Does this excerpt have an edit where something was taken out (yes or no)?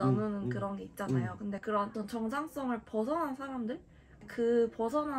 yes